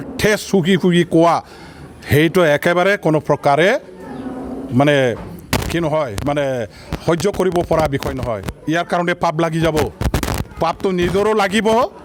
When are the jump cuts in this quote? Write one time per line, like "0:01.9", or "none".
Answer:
none